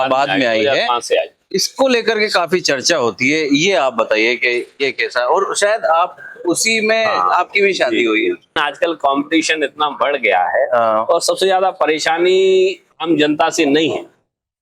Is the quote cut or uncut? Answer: cut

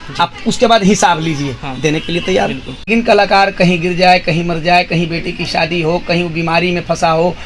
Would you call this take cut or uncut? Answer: cut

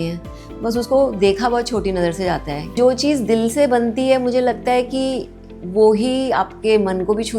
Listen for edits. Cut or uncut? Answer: uncut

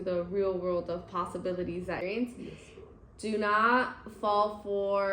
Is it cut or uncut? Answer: cut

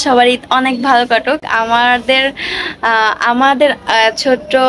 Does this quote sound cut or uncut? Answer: uncut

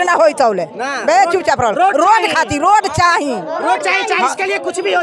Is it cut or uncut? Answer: uncut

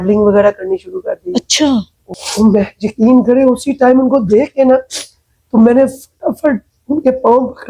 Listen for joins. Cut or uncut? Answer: cut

